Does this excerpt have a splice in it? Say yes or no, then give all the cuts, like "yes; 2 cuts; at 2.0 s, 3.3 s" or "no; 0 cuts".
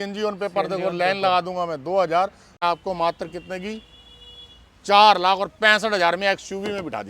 yes; 1 cut; at 2.6 s